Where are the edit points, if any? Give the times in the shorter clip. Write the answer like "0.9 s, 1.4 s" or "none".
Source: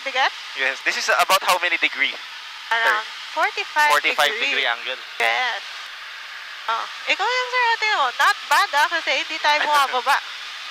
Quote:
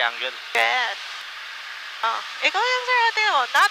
none